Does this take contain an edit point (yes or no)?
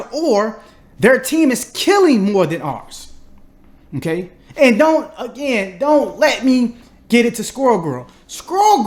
no